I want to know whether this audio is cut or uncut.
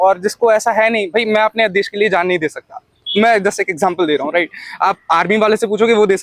uncut